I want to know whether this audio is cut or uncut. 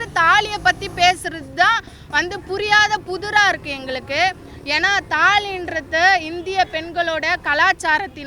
uncut